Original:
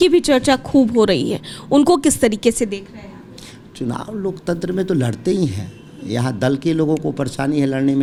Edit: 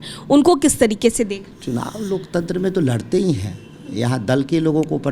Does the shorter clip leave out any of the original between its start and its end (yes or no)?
yes